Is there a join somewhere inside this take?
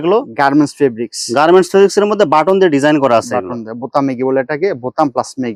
no; 0 cuts

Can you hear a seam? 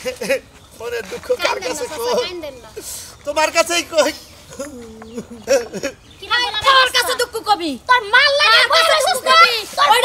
no; 0 cuts

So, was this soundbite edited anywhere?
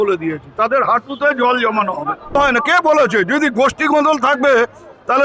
yes; 1 cut; at 2.4 s

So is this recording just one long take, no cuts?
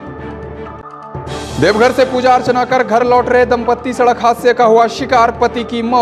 no; 1 cut; at 1.3 s

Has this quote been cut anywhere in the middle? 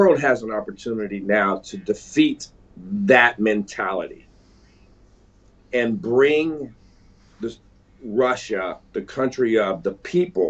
no; 0 cuts

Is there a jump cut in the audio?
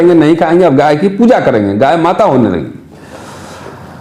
no; 0 cuts

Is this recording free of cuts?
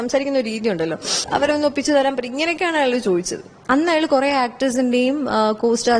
no; 2 cuts; at 1.2 s, 3.5 s

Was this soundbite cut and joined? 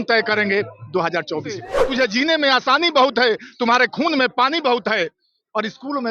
yes; 1 cut; at 1.8 s

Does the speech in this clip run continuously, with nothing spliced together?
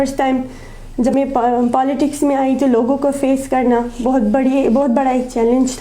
no; 1 cut; at 1.1 s

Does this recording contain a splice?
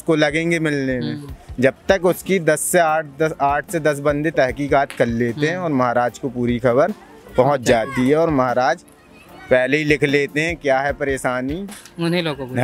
no; 0 cuts

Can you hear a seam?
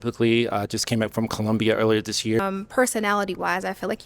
yes; 1 cut; at 2.4 s

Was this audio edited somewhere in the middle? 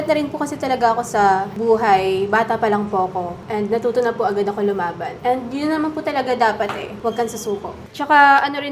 yes; 1 cut; at 7.8 s

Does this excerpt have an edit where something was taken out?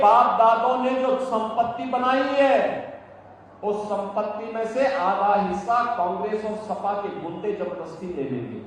no; 0 cuts

